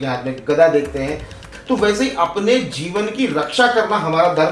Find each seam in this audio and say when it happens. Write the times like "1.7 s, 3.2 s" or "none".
1.5 s